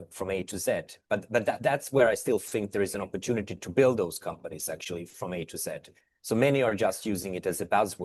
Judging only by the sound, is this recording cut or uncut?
uncut